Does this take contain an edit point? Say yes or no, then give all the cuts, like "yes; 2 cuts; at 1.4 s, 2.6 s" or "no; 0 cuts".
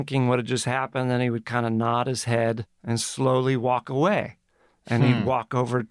yes; 1 cut; at 2.7 s